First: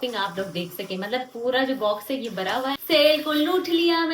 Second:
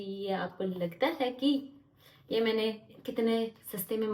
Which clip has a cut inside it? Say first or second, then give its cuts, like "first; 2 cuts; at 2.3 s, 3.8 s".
first; 1 cut; at 2.8 s